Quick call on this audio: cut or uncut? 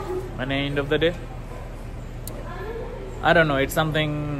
uncut